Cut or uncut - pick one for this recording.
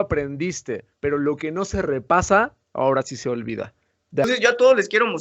cut